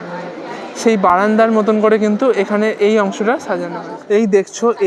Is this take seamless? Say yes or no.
yes